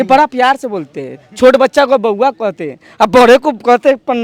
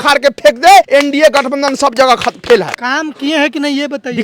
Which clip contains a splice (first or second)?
second